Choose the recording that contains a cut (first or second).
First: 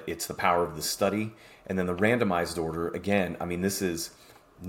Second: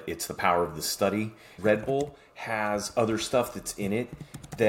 second